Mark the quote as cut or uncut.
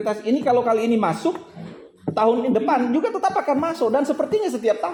uncut